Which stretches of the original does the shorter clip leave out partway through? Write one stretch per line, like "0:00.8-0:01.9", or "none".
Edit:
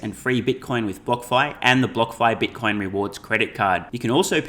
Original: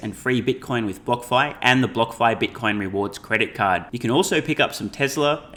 none